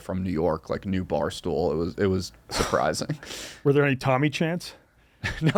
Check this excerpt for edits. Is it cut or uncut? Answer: uncut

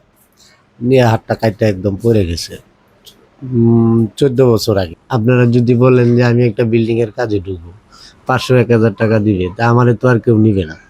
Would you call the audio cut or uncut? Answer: cut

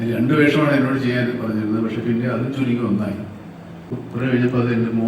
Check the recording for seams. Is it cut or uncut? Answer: cut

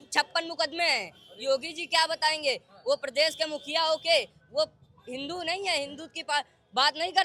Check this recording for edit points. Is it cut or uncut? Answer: uncut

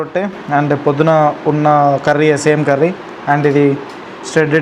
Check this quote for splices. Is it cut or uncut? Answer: uncut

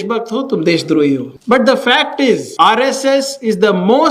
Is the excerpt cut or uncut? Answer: cut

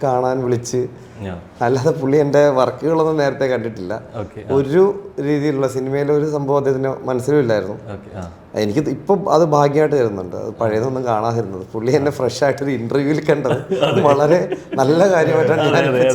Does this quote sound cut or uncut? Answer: uncut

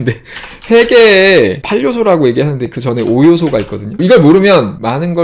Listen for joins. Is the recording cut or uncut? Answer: cut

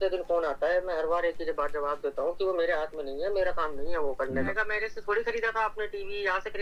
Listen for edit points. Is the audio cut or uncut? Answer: cut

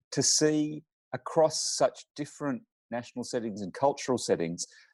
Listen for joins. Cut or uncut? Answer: uncut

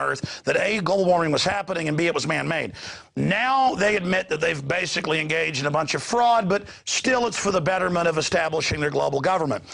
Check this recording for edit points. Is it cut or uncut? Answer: cut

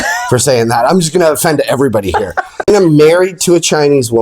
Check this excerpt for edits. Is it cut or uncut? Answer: cut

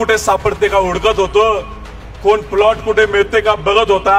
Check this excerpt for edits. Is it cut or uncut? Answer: uncut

